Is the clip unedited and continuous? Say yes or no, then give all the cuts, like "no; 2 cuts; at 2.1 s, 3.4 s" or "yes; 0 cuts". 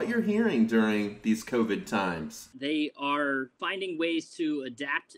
no; 2 cuts; at 2.5 s, 3.6 s